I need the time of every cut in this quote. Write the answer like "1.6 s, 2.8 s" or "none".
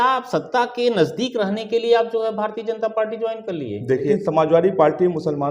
4.1 s